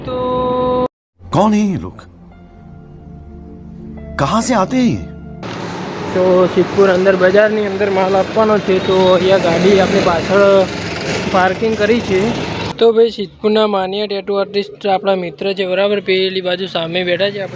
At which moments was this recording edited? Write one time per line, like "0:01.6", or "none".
0:05.4
0:11.2
0:12.6